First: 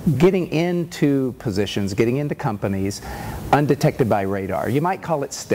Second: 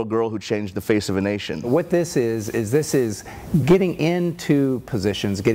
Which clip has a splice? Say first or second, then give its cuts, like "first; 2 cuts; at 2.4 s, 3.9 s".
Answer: second; 1 cut; at 1.7 s